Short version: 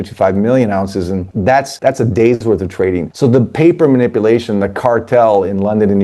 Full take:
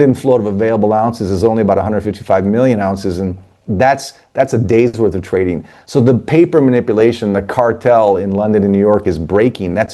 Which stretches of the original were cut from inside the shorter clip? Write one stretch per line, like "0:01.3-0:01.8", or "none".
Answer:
0:03.6-0:04.1
0:05.6-0:05.8